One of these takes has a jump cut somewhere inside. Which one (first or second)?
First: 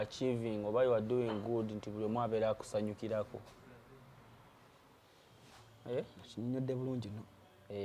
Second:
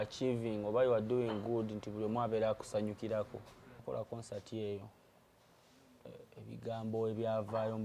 second